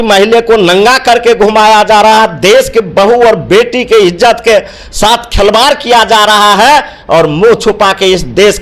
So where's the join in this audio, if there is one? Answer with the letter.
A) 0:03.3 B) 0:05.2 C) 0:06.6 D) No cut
D